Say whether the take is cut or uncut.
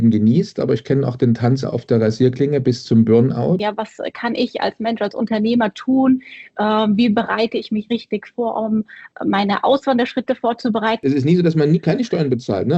cut